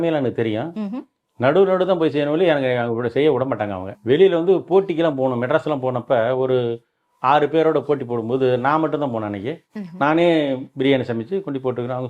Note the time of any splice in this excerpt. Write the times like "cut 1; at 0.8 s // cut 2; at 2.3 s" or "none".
none